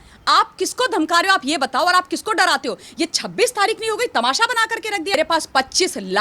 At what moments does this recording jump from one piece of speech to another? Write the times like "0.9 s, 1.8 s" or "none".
5.2 s